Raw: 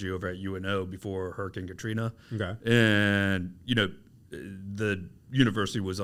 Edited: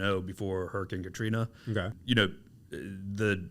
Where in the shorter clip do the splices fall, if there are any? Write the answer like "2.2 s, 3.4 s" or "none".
1.9 s